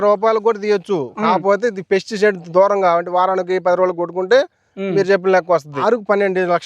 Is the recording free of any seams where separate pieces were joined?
no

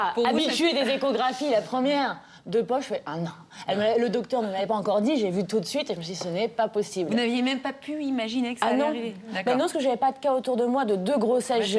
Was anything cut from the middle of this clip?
yes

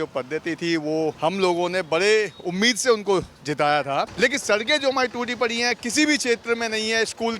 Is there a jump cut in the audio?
yes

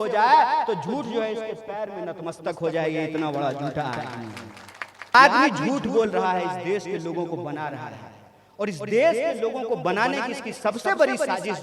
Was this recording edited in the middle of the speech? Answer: yes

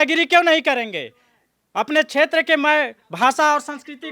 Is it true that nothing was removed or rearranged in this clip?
yes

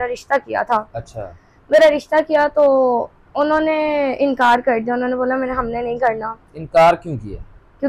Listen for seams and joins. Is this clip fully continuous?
yes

